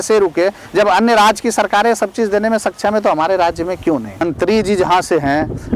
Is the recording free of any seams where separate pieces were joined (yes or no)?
no